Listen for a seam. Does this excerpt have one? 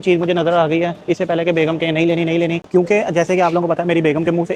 yes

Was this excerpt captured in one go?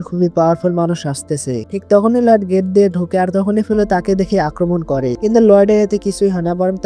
yes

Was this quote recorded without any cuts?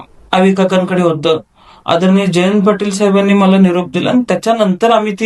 yes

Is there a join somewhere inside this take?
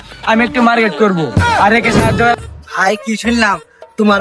yes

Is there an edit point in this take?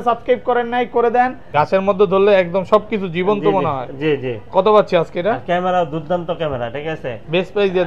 yes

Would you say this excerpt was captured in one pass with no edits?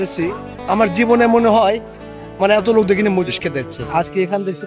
yes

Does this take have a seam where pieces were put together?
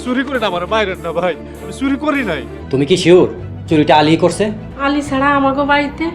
yes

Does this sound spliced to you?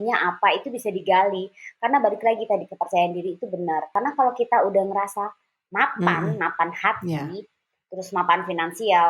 yes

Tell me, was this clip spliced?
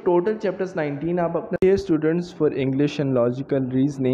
yes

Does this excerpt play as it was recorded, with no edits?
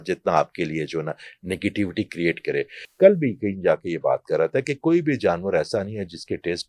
no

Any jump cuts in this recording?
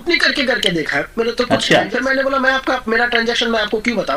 yes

